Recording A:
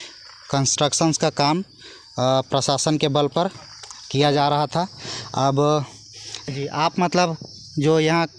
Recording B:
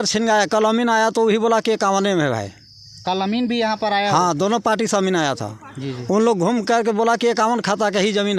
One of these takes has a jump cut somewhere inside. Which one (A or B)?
A